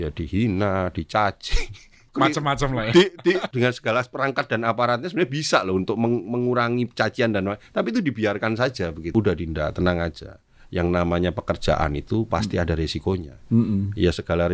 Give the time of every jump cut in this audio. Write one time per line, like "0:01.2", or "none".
0:02.0
0:03.5
0:09.1